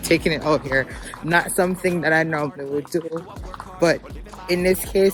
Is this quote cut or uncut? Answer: uncut